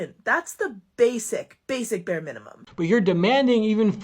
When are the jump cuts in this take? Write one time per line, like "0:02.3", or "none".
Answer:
0:02.6